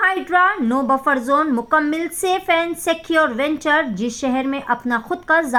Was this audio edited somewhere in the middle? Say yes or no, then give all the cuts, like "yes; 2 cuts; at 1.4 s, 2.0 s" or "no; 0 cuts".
no; 0 cuts